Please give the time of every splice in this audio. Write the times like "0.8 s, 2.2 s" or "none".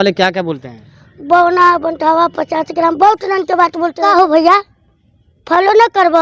4.0 s